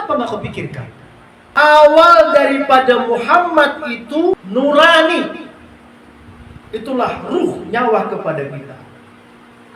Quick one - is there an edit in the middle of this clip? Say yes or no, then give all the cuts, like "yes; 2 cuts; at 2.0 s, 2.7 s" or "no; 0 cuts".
yes; 2 cuts; at 1.5 s, 4.3 s